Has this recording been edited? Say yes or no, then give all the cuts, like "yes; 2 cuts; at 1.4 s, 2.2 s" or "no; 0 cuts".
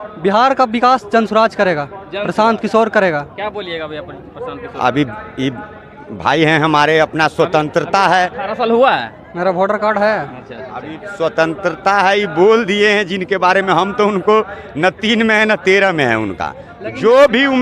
no; 0 cuts